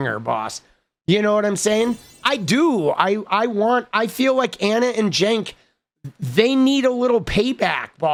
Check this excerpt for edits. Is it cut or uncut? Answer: uncut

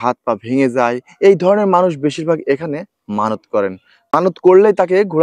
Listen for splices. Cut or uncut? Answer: cut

